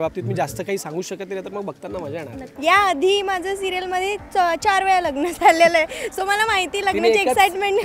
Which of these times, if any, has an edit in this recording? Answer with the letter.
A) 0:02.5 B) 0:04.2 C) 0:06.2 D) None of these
A